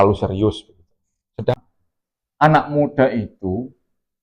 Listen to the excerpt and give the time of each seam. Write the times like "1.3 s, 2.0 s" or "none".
1.6 s